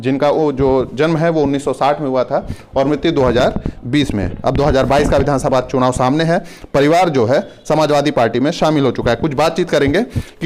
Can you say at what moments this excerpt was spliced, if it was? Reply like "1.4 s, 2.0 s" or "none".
none